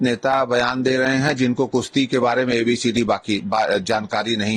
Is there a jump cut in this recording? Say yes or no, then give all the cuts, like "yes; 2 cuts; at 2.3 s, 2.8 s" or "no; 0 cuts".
no; 0 cuts